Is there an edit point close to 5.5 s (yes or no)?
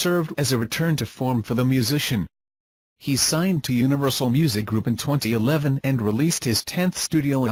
no